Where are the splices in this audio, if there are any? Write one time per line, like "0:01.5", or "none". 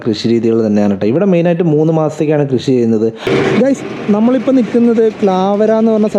0:03.3